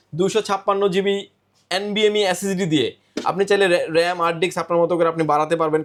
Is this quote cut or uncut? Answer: uncut